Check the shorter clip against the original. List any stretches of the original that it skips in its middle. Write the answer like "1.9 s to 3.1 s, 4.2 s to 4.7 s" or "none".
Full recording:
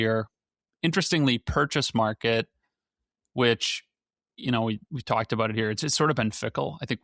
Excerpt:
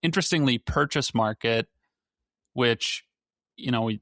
none